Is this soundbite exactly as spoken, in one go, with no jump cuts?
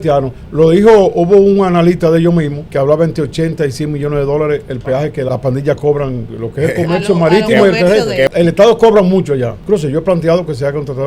no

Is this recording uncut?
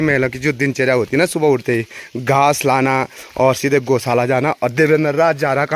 yes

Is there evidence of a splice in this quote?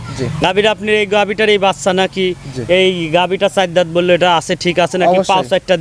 no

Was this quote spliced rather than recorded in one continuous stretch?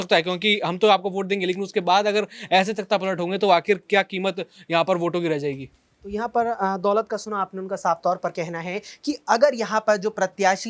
no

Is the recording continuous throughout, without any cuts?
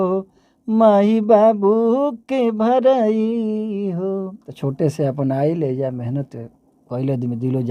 no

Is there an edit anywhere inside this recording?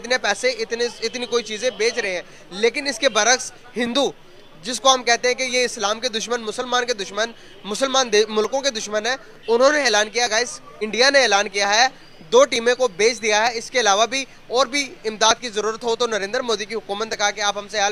no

